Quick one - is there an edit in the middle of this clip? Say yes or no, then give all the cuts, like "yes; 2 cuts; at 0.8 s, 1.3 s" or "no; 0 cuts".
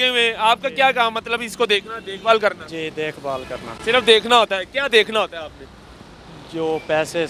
no; 0 cuts